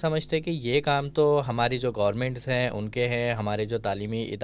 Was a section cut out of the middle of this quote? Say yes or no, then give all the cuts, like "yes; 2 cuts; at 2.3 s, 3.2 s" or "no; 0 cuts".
no; 0 cuts